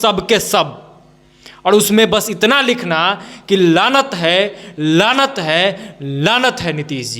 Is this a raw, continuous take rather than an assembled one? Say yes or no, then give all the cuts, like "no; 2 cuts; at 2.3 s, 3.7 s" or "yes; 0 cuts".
yes; 0 cuts